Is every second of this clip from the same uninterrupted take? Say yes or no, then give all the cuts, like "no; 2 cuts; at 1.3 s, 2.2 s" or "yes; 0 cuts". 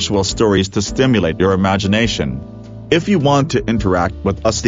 yes; 0 cuts